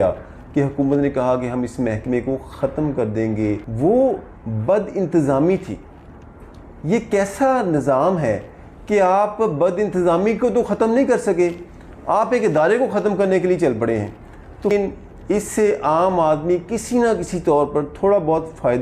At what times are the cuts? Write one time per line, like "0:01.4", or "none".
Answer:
0:03.7
0:14.7